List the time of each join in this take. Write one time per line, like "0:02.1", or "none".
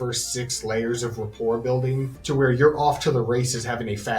0:02.1